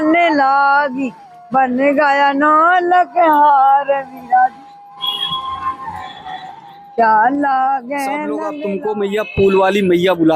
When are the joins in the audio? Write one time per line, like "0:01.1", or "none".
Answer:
0:08.5